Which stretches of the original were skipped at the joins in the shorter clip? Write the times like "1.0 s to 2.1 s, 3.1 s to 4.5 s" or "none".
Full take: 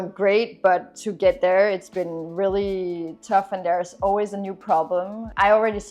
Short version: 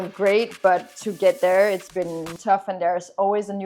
2.3 s to 3.1 s